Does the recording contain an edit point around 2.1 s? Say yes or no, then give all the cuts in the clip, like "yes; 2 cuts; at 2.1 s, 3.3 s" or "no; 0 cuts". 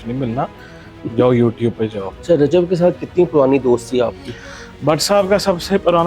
yes; 1 cut; at 2.1 s